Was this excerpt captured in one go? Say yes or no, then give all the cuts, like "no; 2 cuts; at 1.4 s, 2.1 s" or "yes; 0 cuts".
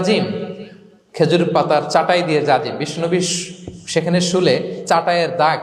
yes; 0 cuts